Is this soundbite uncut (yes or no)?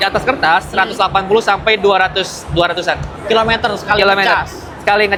yes